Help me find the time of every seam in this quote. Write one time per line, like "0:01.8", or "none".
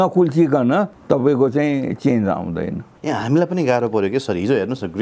0:01.0
0:02.9